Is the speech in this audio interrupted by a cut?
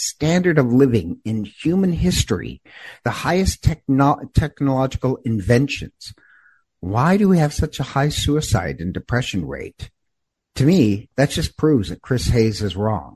no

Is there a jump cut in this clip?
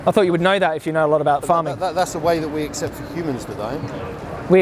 no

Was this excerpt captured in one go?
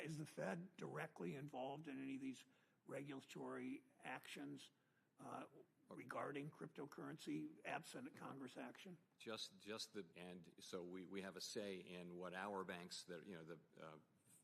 no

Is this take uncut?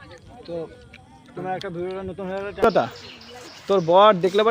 no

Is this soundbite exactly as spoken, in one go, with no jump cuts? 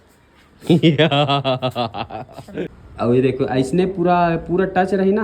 no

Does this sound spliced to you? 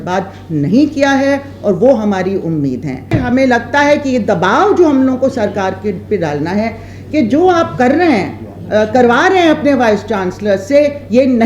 yes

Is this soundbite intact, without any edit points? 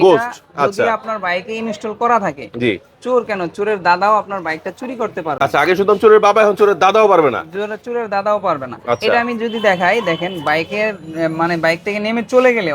yes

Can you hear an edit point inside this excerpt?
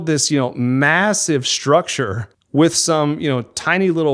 no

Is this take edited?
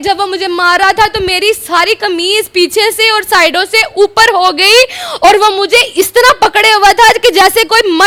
no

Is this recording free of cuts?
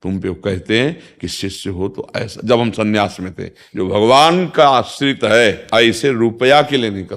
no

